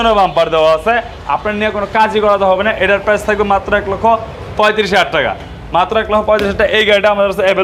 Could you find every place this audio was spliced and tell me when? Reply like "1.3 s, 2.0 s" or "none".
none